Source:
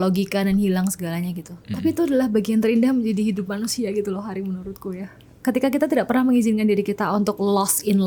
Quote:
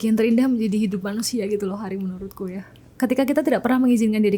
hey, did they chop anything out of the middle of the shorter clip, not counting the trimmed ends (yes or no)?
no